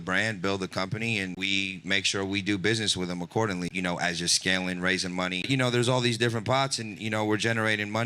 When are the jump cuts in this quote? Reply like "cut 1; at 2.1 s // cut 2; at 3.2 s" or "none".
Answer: cut 1; at 1.4 s // cut 2; at 3.7 s // cut 3; at 5.5 s